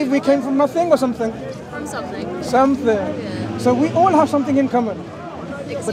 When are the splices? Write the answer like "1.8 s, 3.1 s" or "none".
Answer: none